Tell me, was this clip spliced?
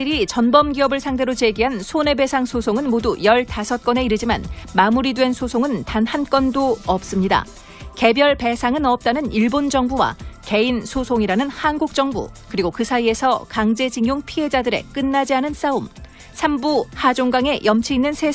no; 0 cuts

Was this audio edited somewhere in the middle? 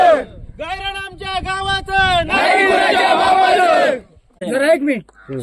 yes; 1 cut; at 4.3 s

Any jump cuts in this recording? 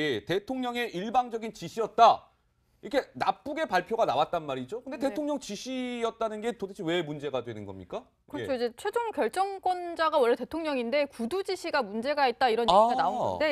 no; 0 cuts

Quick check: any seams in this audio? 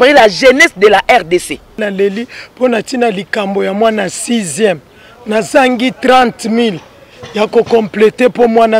yes; 1 cut; at 1.8 s

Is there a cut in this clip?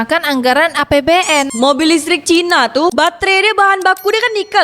yes; 2 cuts; at 1.5 s, 2.9 s

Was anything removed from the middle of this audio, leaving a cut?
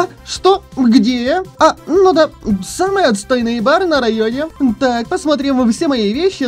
yes; 2 cuts; at 1.5 s, 4.5 s

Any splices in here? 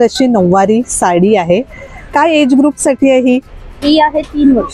no; 0 cuts

